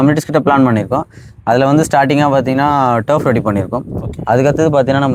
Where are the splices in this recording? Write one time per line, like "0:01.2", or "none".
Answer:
none